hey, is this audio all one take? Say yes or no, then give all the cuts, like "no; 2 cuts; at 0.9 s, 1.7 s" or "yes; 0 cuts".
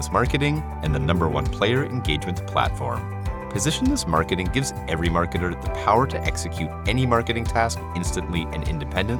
yes; 0 cuts